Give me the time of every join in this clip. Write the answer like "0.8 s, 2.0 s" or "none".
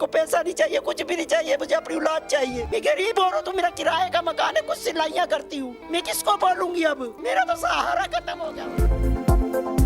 2.7 s, 8.6 s